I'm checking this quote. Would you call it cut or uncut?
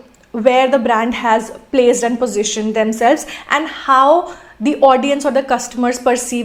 uncut